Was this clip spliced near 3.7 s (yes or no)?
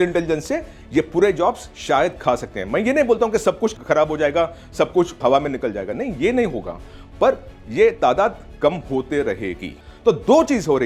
no